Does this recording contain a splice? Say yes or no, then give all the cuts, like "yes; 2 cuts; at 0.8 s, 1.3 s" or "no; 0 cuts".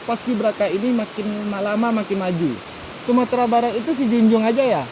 yes; 1 cut; at 2.6 s